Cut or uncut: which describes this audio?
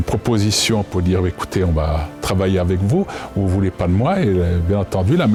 uncut